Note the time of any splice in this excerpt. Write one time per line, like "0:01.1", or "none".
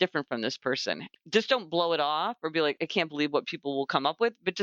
0:01.0
0:02.8